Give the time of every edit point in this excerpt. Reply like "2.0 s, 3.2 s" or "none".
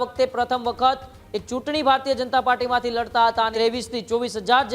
3.5 s